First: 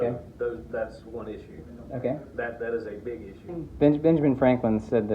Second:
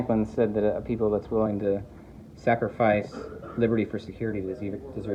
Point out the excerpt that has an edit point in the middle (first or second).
first